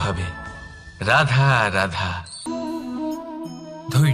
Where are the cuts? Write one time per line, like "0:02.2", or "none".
0:02.4